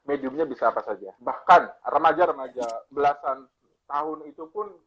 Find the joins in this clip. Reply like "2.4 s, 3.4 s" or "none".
1.1 s, 1.8 s